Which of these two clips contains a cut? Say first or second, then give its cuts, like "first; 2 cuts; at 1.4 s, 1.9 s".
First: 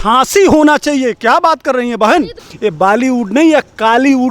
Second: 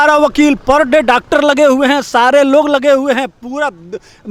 first; 1 cut; at 2.4 s